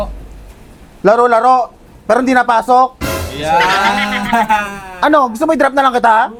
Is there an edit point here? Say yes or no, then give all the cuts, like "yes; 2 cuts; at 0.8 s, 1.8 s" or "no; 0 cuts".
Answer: no; 0 cuts